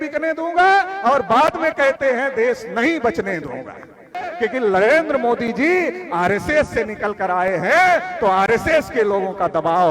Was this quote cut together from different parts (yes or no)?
yes